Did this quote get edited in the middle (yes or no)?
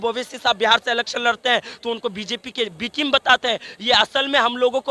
no